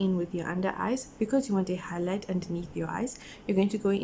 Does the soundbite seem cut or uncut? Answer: uncut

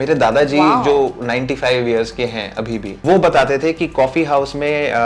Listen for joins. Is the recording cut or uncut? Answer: cut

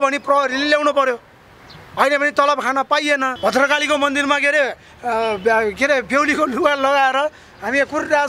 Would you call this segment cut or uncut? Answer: cut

